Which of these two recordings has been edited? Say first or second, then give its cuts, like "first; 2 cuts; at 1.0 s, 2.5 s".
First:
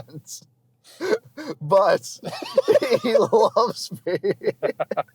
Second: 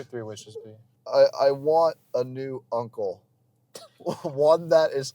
second; 1 cut; at 0.9 s